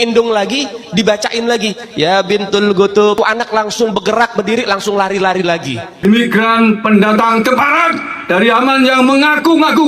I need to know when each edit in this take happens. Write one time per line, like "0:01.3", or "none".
0:02.9
0:06.0